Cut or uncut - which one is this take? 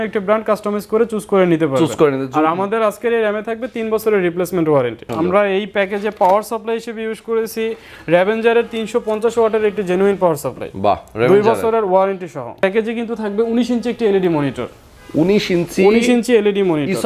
cut